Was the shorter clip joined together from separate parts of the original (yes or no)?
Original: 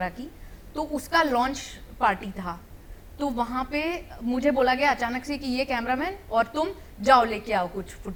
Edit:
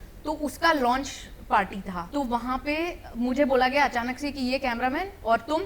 yes